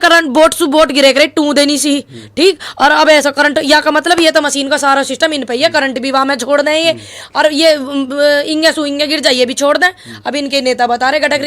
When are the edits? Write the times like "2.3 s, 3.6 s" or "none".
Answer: none